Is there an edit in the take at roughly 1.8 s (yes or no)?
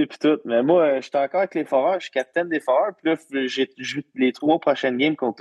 no